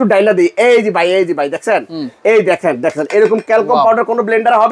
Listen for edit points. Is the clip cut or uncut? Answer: uncut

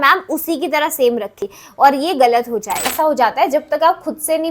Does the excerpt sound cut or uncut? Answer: cut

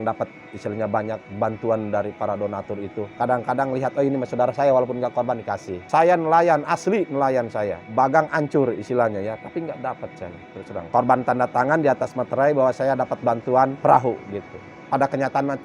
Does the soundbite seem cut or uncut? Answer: cut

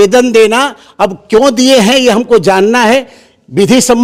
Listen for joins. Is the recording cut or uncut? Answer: uncut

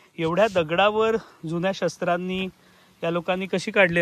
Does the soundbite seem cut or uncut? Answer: uncut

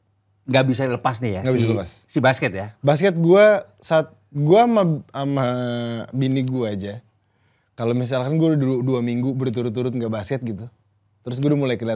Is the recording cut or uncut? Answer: uncut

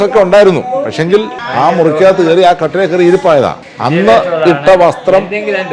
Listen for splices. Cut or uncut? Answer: cut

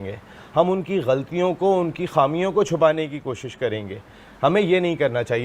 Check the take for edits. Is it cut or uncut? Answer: uncut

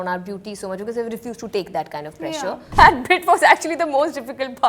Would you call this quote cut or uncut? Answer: cut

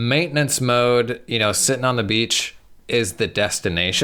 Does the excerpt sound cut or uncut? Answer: uncut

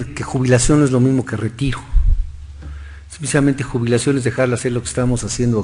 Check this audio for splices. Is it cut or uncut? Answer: cut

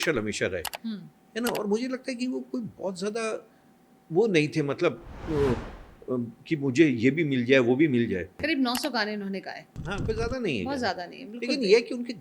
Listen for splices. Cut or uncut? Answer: cut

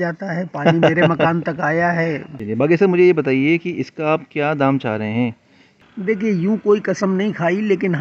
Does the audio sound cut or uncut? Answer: cut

